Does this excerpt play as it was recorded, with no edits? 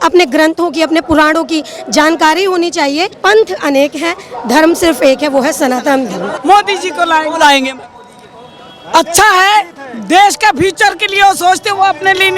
no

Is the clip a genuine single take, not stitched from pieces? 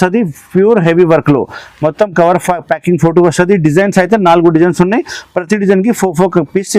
yes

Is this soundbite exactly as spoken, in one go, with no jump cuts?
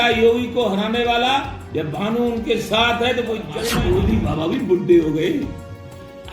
no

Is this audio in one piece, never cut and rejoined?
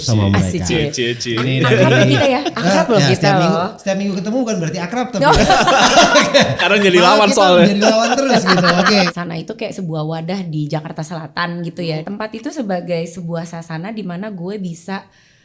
no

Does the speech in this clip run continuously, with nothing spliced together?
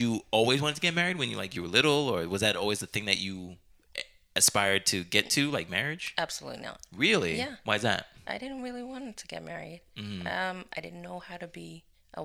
yes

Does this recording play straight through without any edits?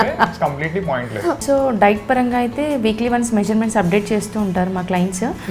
no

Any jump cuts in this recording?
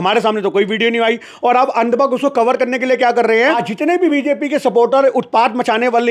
yes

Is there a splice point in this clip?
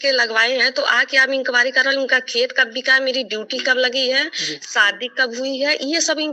no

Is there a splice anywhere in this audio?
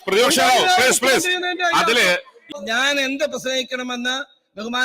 yes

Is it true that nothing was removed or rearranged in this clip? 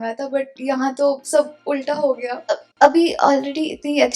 no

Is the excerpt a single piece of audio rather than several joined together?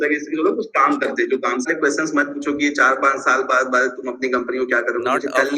no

